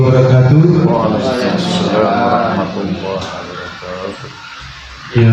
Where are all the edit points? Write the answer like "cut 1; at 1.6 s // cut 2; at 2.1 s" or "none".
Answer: none